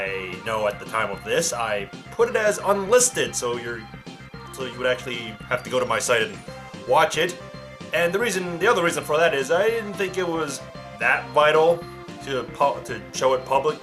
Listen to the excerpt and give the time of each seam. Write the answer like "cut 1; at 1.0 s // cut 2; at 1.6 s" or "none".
cut 1; at 11.9 s